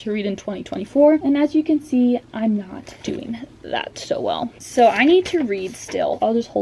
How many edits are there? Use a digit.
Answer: 0